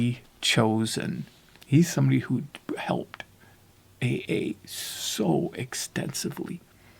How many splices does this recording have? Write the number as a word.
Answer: zero